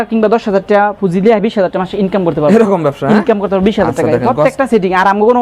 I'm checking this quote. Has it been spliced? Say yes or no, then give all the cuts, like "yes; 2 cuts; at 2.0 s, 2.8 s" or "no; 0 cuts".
no; 0 cuts